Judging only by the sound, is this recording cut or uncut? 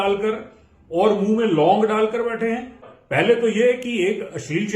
cut